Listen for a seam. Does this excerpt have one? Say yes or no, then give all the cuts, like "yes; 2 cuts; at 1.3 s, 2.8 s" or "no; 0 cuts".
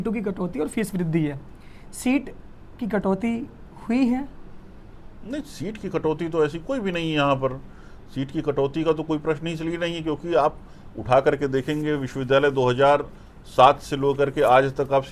no; 0 cuts